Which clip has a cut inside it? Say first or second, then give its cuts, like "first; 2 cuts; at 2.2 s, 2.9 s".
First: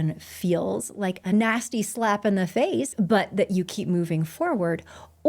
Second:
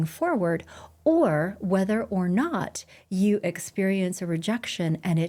first; 1 cut; at 2.9 s